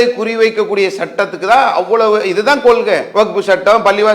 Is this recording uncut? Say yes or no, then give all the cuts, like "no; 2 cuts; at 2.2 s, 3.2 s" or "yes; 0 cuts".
no; 1 cut; at 3.1 s